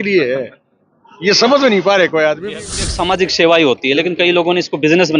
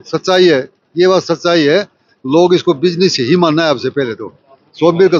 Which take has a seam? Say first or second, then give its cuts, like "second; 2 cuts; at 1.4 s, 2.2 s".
first; 1 cut; at 2.8 s